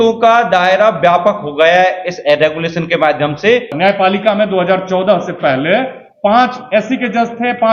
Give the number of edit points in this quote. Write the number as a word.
one